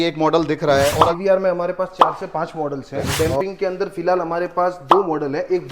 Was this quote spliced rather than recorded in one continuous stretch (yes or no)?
yes